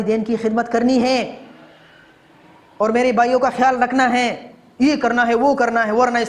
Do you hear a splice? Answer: no; 0 cuts

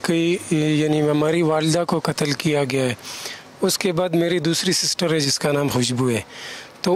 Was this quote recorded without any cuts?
yes; 0 cuts

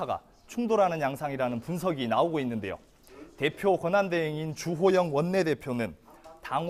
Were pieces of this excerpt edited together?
no; 0 cuts

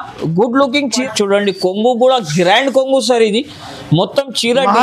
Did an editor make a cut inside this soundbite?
yes; 1 cut; at 1.0 s

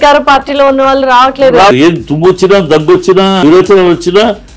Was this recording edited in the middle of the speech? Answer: yes; 1 cut; at 1.7 s

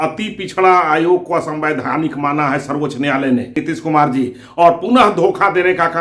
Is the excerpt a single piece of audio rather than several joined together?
no; 1 cut; at 3.6 s

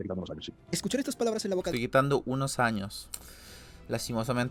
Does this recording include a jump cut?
no; 0 cuts

